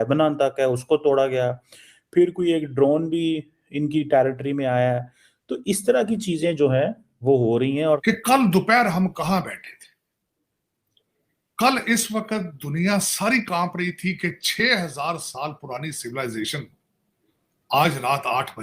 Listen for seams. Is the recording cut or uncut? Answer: cut